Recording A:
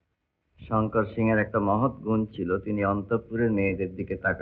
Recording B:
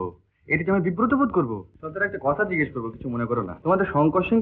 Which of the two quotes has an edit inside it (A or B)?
B